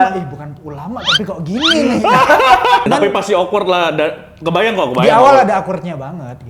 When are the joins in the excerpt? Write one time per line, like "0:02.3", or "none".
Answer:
0:02.9